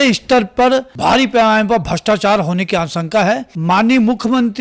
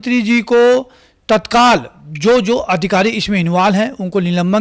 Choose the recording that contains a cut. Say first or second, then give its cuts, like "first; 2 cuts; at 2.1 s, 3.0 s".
first; 2 cuts; at 0.9 s, 3.5 s